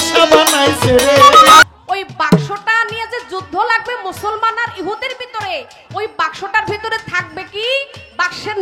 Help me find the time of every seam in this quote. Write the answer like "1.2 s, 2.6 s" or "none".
1.6 s

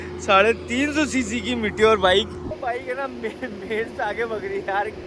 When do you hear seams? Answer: 2.5 s

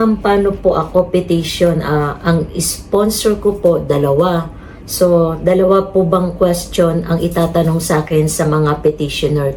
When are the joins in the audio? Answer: none

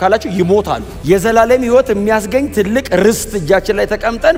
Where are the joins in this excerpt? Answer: none

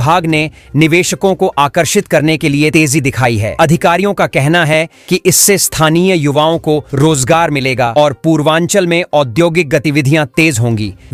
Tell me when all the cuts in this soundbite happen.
none

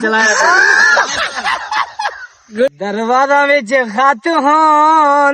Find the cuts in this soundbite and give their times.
2.7 s

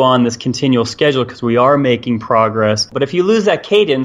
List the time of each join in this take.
2.9 s

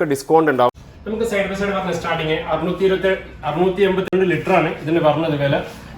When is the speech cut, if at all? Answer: 0.9 s

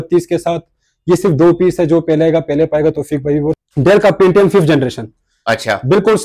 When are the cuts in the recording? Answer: 3.6 s

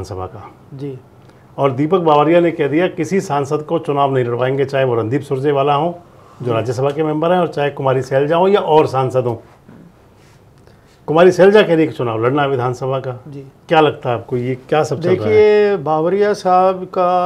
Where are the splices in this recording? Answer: none

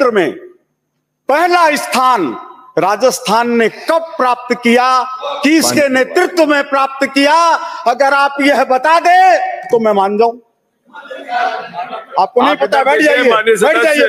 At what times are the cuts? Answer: none

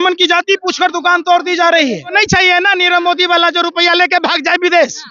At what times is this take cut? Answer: 2.1 s

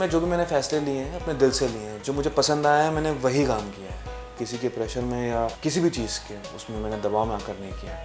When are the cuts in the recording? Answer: none

